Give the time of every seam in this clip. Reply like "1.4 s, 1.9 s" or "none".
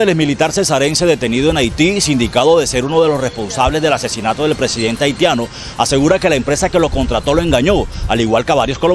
none